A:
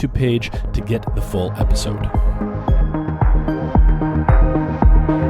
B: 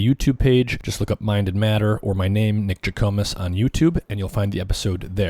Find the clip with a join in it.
A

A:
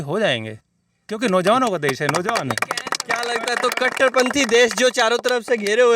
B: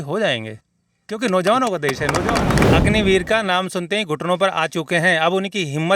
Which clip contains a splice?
B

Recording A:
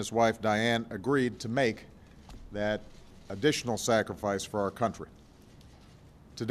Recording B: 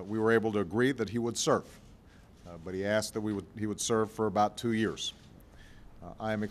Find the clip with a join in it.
B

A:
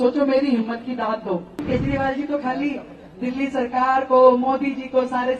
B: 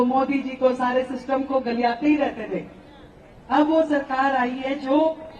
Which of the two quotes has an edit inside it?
A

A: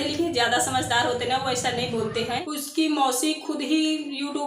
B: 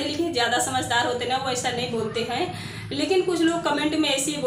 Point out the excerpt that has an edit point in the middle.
A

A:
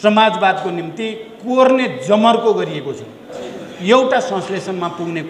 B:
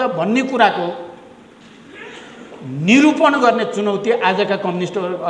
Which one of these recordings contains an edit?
A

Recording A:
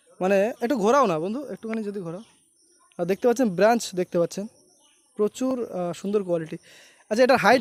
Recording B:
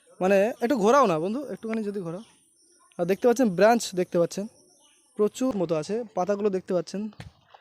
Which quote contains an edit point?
B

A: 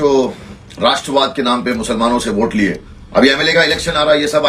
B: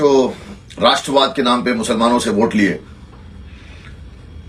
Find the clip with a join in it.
A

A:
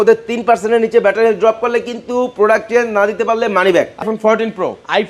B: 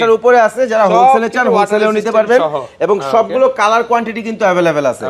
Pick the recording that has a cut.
A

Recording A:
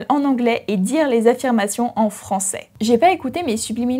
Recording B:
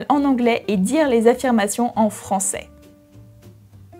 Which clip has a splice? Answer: A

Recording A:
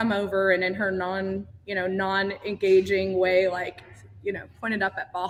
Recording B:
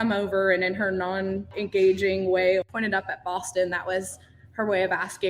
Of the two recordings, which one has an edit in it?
B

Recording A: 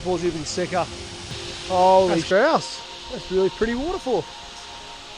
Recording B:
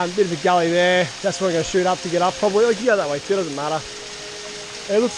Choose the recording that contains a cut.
A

